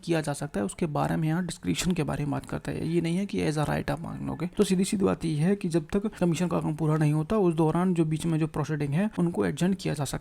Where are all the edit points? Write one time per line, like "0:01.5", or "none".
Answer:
0:04.5
0:06.1
0:09.1